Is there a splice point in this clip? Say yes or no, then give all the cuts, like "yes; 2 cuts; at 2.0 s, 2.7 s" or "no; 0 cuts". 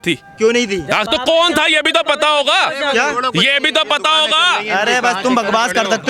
no; 0 cuts